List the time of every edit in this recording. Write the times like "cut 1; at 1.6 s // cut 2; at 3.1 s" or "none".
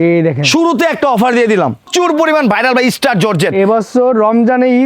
cut 1; at 1.9 s